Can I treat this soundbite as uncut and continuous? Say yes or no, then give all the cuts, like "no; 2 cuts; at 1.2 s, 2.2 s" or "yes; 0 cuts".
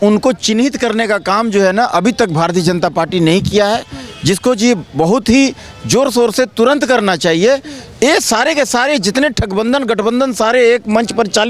yes; 0 cuts